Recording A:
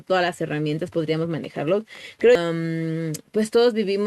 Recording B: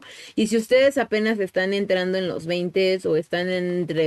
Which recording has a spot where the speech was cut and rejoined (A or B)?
A